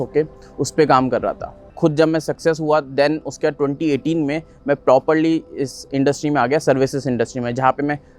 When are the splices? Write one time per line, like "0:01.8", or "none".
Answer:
0:01.6